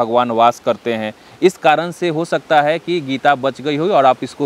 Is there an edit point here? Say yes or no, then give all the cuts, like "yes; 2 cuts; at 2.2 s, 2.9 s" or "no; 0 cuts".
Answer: no; 0 cuts